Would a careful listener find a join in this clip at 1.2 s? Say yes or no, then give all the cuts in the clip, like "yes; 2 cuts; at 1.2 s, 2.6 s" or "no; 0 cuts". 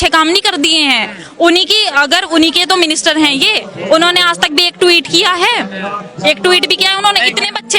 no; 0 cuts